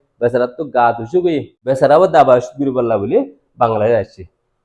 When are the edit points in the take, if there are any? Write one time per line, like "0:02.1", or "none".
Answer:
0:01.6